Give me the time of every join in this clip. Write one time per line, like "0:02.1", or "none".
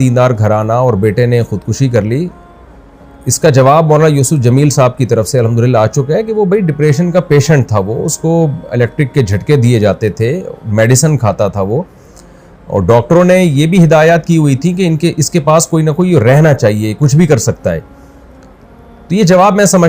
none